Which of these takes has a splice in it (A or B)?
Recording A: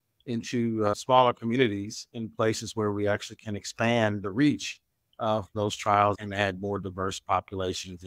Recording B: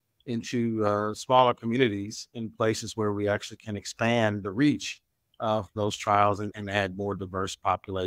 A